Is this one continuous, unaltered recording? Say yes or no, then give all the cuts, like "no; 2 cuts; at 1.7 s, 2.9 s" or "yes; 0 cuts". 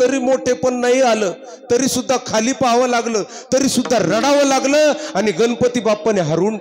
yes; 0 cuts